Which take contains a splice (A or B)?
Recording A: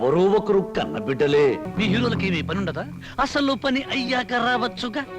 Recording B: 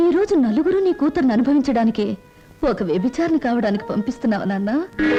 A